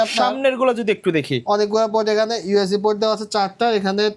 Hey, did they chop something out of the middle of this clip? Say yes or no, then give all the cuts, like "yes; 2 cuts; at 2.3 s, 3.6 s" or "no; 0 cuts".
no; 0 cuts